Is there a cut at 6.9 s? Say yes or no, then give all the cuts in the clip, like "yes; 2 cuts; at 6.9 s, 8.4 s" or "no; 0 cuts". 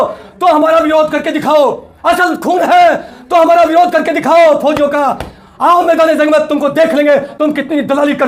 no; 0 cuts